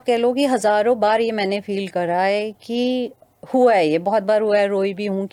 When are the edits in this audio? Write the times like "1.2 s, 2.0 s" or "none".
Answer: none